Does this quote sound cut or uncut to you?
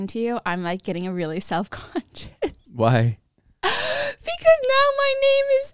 uncut